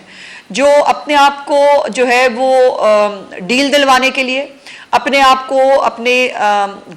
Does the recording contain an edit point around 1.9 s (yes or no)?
no